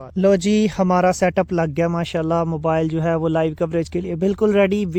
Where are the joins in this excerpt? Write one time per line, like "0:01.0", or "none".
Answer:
none